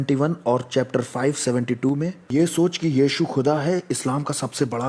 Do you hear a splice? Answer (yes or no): yes